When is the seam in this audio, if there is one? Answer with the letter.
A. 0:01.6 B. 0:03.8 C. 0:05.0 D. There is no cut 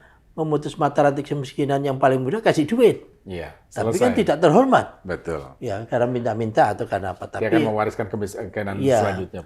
D